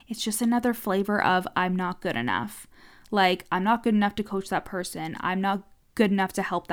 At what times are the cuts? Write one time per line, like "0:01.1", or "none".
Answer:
0:05.8